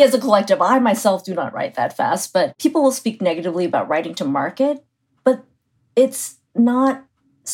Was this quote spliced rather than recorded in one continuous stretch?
yes; 1 cut; at 2.5 s

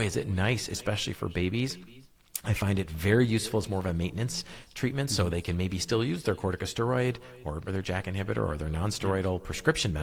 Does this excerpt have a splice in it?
no; 0 cuts

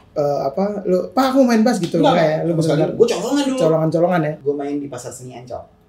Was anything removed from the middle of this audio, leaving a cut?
yes; 1 cut; at 4.4 s

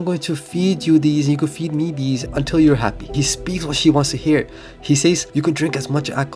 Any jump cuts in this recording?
yes; 3 cuts; at 2.2 s, 3.2 s, 5.2 s

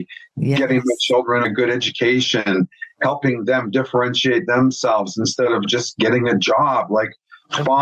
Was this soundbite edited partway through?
yes; 2 cuts; at 1.4 s, 5.7 s

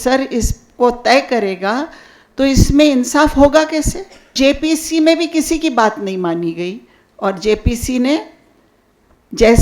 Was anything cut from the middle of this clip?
yes; 1 cut; at 4.3 s

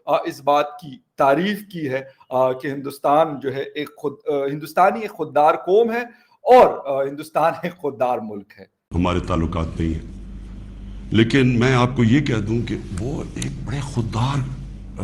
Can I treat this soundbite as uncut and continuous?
no; 1 cut; at 8.9 s

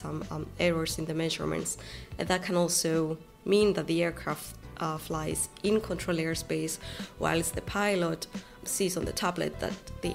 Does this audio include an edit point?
no; 0 cuts

